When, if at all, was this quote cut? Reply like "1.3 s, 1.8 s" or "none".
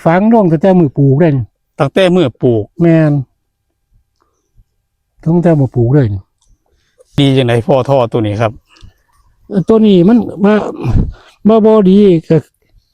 7.2 s

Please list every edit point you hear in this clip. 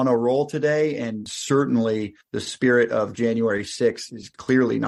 none

